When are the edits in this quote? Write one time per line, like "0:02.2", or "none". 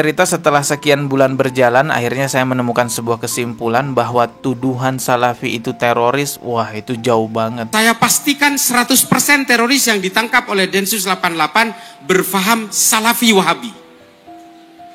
none